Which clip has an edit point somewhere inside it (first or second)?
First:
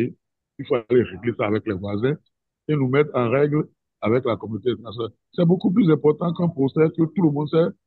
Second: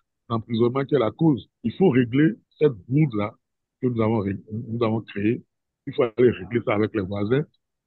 second